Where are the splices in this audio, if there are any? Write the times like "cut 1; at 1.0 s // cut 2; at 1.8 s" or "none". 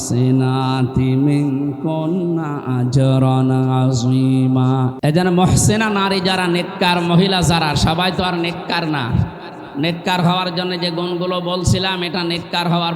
cut 1; at 4.9 s